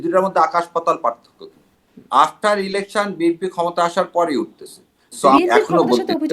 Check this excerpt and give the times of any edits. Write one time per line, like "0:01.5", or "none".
0:01.7
0:05.4